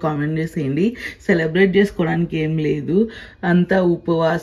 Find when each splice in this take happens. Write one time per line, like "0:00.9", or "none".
none

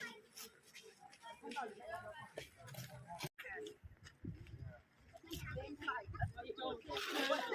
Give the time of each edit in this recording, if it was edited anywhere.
0:03.4

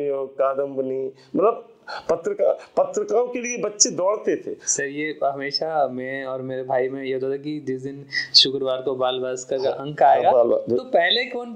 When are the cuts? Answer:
none

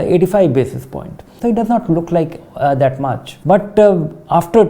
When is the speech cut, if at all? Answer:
0:01.3
0:03.3

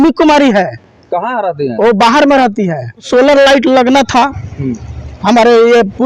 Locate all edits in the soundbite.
0:03.1

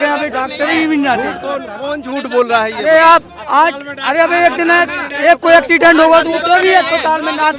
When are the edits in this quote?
none

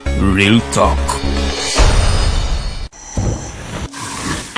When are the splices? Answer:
0:02.8

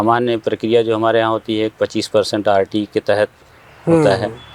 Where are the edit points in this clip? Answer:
none

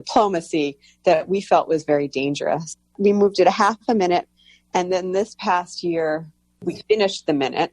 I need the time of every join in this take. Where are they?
0:02.8
0:06.8

